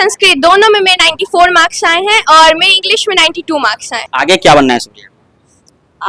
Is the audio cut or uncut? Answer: cut